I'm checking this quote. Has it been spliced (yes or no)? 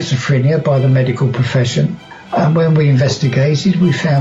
yes